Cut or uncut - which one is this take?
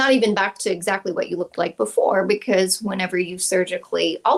uncut